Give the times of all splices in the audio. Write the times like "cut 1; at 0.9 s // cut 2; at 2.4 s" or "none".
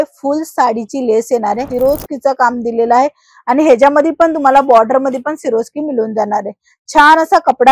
cut 1; at 1.7 s